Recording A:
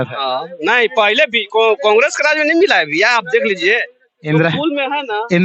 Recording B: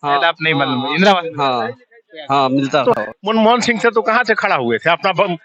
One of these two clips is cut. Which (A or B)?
B